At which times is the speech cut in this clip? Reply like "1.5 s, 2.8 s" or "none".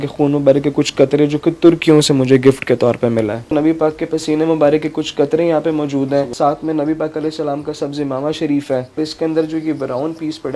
3.4 s, 6.3 s, 9.0 s